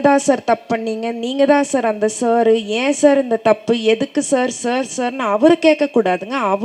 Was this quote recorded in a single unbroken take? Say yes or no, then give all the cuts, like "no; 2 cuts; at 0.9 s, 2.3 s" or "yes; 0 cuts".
yes; 0 cuts